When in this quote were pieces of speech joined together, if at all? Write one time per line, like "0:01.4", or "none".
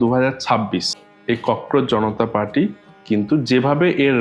0:01.0